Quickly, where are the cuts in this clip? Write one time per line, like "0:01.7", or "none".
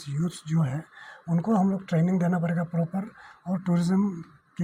none